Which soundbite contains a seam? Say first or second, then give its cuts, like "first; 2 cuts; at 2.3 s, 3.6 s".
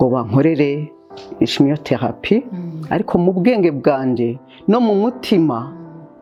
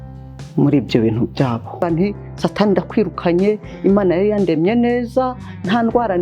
second; 1 cut; at 1.8 s